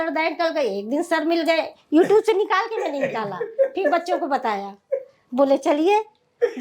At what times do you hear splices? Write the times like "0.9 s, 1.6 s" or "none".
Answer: none